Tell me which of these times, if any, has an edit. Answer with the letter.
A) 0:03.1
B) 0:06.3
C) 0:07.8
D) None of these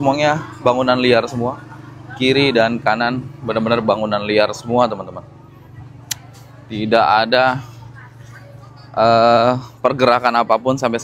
D